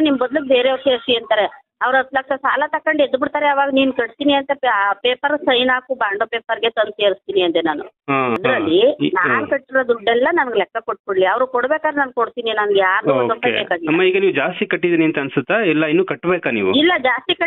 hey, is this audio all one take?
no; 1 cut; at 8.4 s

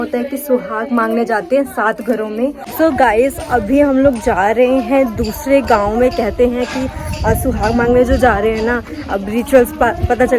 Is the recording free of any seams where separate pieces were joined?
no; 1 cut; at 2.6 s

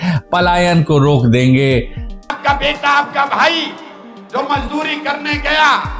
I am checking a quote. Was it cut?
yes; 1 cut; at 2.3 s

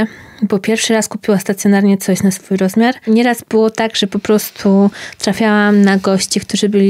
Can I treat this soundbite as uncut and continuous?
no; 1 cut; at 3.0 s

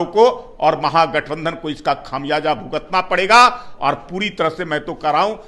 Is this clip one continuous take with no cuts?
yes; 0 cuts

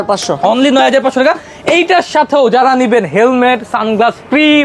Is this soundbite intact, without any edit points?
yes; 0 cuts

